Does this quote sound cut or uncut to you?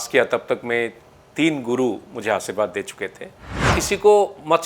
cut